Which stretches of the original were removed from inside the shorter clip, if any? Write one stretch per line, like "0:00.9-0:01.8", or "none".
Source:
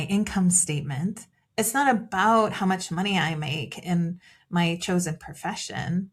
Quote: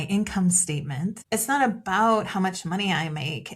0:01.2-0:01.5